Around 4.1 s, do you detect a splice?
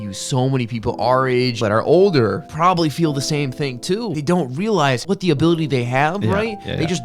yes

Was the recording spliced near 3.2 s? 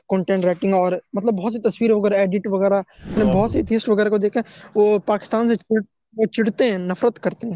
yes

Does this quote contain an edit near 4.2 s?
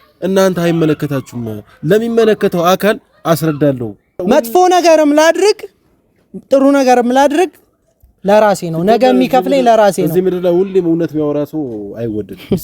yes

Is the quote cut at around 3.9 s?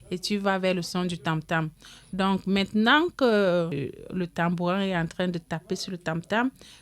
yes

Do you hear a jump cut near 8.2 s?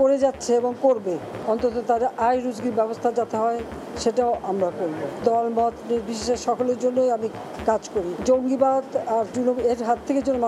yes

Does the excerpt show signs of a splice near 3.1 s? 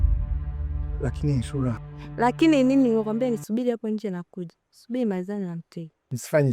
no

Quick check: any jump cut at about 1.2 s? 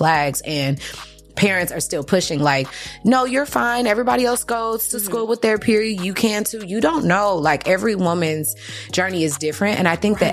no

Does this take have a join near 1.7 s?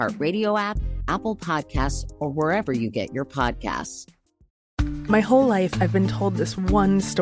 no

